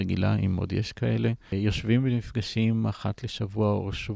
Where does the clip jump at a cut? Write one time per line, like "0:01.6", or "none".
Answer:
0:01.5